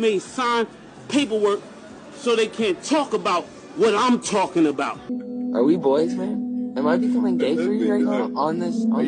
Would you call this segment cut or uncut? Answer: cut